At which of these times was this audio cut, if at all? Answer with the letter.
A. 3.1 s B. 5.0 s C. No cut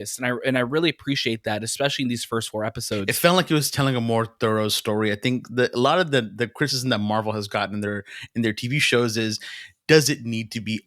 A